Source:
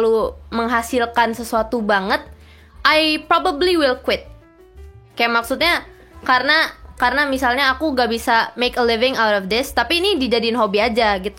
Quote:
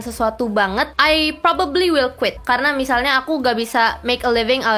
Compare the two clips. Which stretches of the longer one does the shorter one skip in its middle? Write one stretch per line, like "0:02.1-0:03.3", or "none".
0:02.3-0:02.8
0:04.2-0:06.9